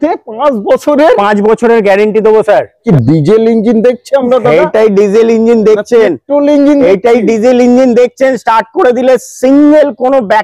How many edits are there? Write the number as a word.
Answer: one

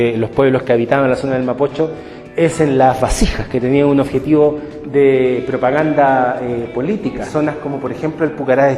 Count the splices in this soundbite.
one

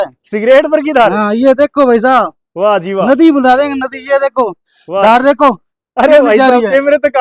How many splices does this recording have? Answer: zero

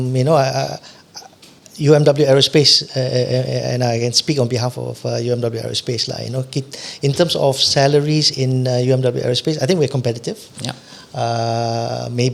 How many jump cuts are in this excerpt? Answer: zero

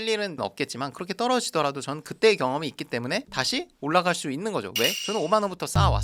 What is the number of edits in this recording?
zero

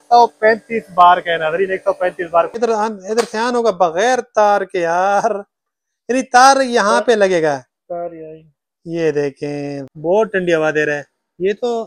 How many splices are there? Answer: two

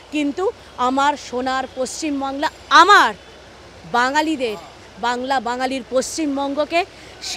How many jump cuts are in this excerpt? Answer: zero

